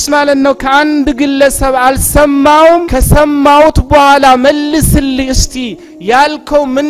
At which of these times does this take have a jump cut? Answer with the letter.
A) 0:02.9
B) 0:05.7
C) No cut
A